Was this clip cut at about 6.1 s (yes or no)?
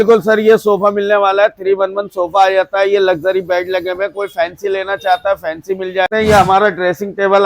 yes